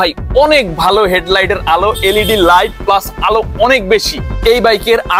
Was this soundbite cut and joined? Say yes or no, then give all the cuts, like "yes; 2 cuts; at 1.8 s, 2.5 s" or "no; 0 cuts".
yes; 1 cut; at 4.3 s